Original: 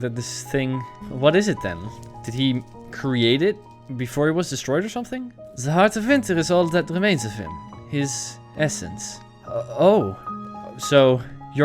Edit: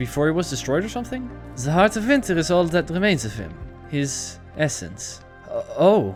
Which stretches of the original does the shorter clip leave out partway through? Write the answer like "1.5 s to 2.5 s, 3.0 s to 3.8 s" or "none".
none